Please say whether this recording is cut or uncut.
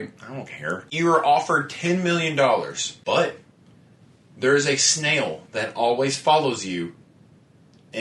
cut